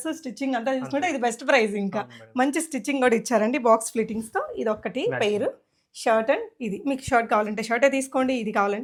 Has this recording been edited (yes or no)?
no